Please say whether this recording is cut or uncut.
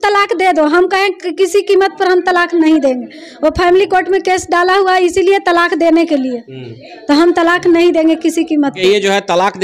uncut